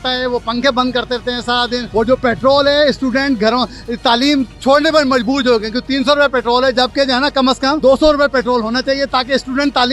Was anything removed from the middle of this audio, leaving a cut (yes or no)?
yes